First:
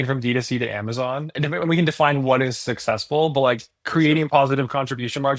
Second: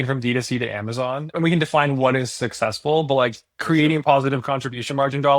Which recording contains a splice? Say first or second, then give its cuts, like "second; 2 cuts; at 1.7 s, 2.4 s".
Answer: second; 1 cut; at 1.3 s